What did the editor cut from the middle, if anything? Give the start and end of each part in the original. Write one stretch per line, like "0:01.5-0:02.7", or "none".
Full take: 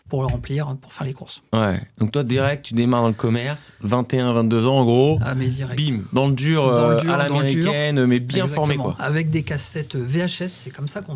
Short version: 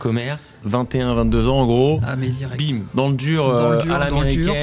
none